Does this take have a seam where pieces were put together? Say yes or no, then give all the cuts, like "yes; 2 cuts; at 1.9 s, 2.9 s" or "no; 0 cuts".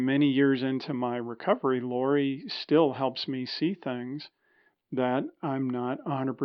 no; 0 cuts